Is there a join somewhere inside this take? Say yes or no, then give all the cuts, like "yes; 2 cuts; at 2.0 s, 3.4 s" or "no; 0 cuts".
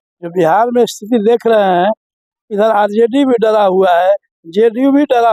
no; 0 cuts